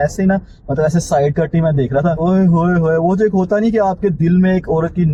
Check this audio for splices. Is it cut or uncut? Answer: uncut